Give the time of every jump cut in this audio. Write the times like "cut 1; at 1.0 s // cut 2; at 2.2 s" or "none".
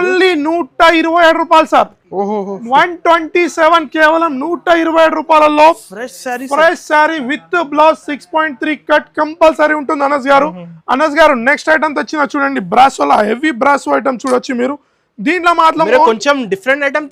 none